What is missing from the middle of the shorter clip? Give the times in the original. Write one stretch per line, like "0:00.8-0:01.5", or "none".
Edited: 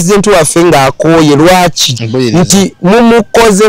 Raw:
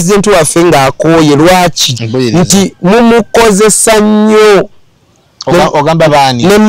none